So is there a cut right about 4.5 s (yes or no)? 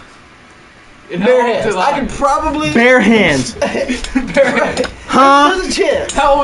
no